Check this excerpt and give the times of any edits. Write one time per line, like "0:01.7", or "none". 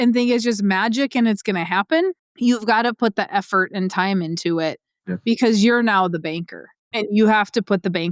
0:02.3
0:06.9